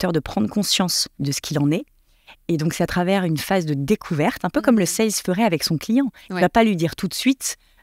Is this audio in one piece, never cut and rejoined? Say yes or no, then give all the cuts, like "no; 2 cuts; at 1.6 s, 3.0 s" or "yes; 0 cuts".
no; 1 cut; at 1.2 s